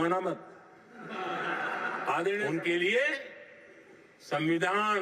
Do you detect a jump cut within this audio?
yes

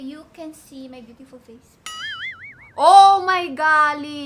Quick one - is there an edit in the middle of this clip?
yes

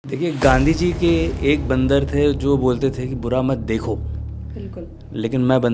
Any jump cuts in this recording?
no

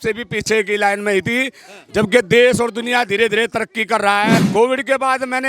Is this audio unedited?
no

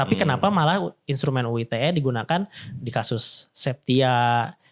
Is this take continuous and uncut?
yes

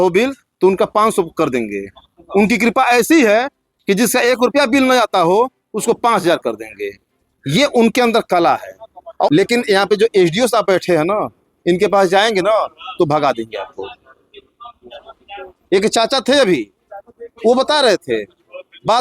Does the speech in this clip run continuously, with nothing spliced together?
no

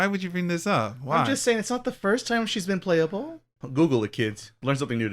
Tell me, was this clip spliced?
yes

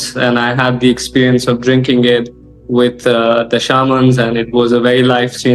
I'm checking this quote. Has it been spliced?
no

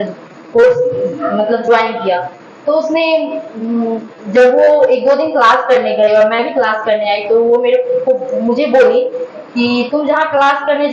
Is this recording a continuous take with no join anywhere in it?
yes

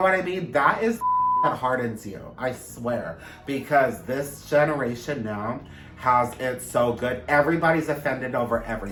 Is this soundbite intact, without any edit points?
yes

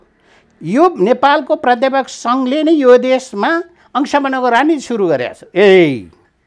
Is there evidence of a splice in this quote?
no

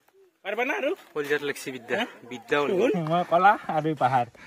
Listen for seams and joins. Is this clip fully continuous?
no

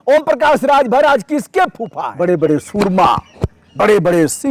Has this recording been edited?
yes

